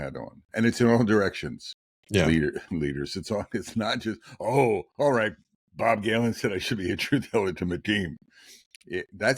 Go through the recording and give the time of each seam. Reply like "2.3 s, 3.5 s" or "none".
none

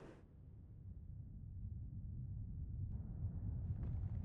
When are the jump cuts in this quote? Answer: 2.9 s

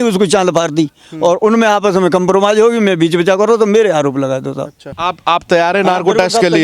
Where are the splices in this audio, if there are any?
5.0 s

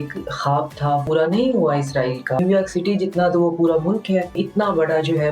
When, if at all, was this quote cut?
1.0 s, 2.4 s, 4.4 s

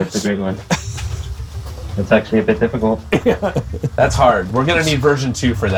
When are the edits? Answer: none

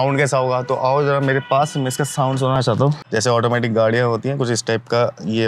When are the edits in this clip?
2.7 s

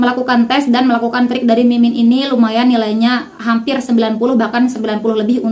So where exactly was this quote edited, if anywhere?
none

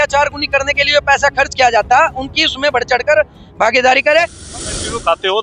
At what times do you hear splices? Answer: 4.4 s

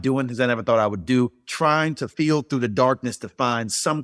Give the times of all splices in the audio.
1.7 s

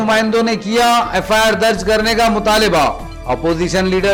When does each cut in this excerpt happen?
none

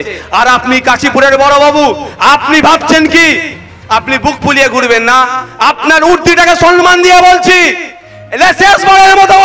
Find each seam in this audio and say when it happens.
none

